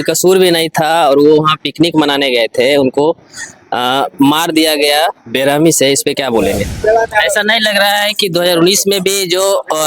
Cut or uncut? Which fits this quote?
cut